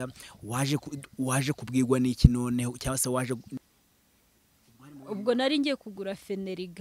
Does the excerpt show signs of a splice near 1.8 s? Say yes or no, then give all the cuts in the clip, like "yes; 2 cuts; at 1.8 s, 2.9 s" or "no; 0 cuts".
no; 1 cut; at 3.5 s